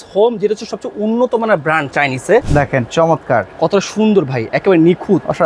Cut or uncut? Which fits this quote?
cut